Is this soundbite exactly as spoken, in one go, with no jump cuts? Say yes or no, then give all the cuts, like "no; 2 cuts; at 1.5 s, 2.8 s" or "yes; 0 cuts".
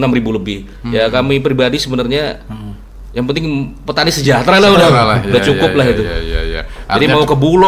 yes; 0 cuts